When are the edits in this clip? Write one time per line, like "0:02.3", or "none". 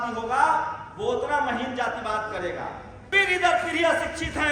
0:03.1